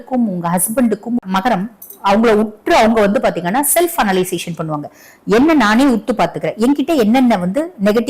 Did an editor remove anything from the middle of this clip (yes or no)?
yes